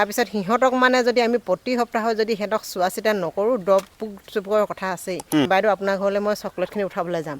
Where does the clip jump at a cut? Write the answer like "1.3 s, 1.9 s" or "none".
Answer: 5.5 s